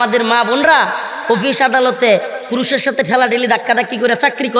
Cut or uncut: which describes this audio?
uncut